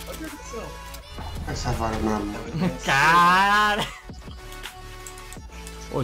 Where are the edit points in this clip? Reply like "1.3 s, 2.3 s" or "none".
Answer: 4.0 s